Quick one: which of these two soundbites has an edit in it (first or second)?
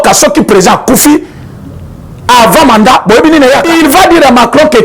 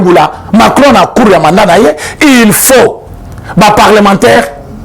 first